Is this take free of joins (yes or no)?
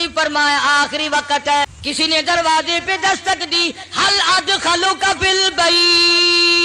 no